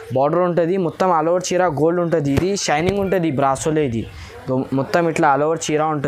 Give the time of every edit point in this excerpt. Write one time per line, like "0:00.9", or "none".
none